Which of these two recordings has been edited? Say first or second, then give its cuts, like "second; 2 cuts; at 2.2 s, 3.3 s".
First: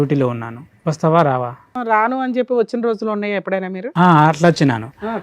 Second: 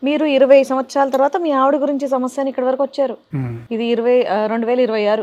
first; 1 cut; at 1.7 s